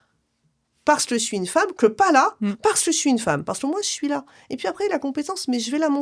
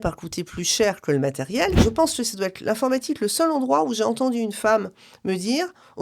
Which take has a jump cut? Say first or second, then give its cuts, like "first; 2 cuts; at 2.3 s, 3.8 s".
second; 1 cut; at 1.8 s